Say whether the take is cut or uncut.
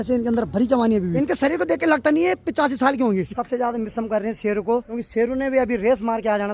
cut